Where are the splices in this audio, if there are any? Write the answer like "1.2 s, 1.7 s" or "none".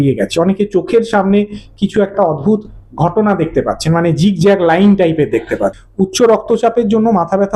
5.8 s